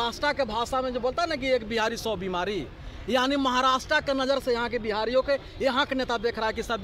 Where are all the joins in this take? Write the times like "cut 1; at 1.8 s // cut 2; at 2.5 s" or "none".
none